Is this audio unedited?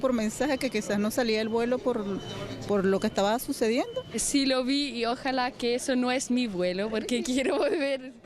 no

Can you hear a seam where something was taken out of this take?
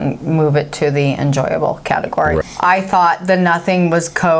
yes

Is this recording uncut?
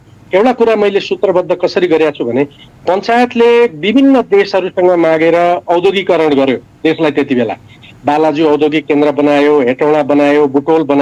yes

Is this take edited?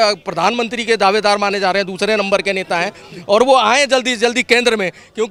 no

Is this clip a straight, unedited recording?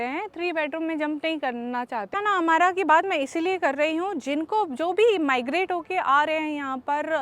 no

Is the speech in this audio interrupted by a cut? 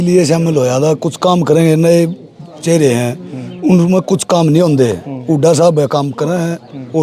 no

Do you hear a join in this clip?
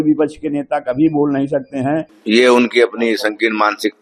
yes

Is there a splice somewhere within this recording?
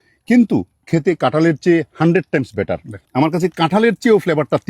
yes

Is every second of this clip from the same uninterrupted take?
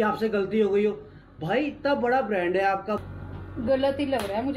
no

